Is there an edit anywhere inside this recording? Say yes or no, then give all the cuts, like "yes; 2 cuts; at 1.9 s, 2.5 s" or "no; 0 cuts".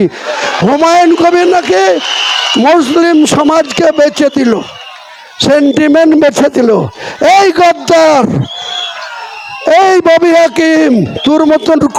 no; 0 cuts